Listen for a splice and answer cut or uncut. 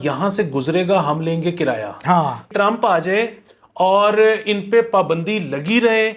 cut